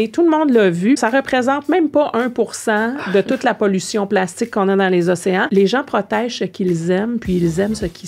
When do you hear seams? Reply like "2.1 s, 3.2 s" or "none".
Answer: 1.0 s, 5.5 s